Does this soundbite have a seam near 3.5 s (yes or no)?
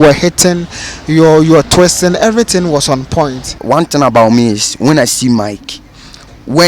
yes